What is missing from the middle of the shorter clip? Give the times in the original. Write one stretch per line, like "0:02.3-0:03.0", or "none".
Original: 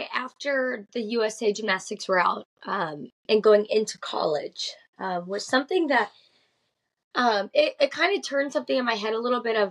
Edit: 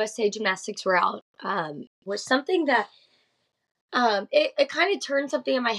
0:03.2-0:05.2